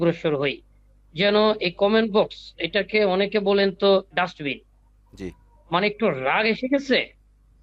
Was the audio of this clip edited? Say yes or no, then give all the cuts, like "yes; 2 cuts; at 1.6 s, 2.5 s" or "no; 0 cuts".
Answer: no; 0 cuts